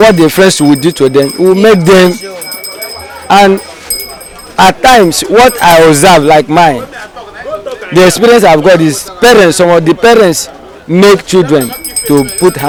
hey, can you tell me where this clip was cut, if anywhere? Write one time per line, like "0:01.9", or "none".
none